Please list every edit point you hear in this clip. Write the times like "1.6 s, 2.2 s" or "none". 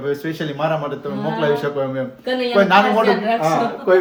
none